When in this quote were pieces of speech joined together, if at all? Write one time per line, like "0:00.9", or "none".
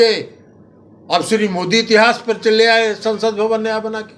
none